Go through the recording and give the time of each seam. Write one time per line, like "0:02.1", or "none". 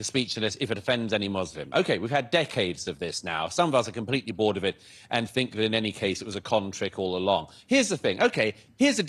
0:07.5